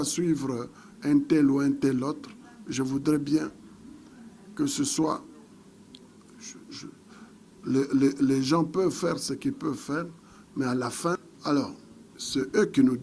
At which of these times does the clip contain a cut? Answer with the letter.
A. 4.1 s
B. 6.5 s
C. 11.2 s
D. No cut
C